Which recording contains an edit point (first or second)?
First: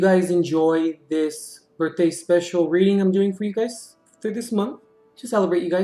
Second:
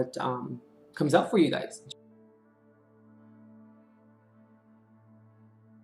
second